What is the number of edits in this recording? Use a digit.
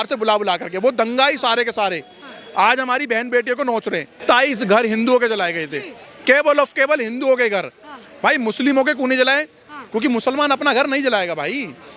0